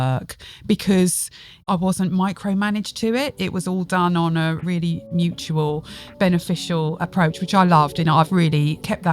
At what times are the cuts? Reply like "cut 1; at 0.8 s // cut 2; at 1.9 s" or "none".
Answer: cut 1; at 1.5 s // cut 2; at 4.6 s // cut 3; at 7.0 s // cut 4; at 8.4 s